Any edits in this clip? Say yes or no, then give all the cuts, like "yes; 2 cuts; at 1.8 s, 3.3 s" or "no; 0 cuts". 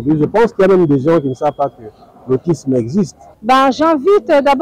yes; 1 cut; at 3.3 s